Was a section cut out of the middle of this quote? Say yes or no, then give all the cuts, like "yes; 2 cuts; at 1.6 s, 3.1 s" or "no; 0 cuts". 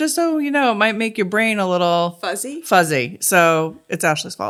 no; 0 cuts